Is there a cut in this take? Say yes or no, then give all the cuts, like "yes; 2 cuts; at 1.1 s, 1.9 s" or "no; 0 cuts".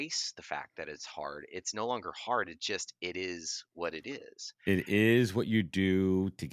no; 0 cuts